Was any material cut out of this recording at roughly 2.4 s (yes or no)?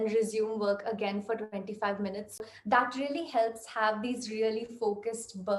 yes